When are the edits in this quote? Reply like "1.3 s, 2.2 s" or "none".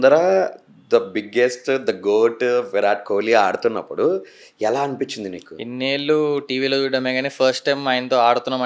none